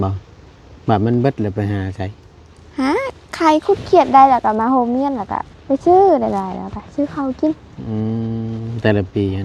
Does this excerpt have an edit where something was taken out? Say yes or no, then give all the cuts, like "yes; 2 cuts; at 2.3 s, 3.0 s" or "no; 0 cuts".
no; 0 cuts